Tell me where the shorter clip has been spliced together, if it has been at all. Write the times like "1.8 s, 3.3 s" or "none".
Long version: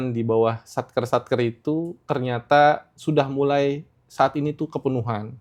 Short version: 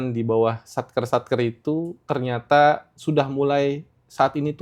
none